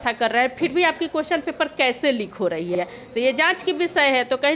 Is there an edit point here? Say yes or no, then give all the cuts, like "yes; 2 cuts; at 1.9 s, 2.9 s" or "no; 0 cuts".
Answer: no; 0 cuts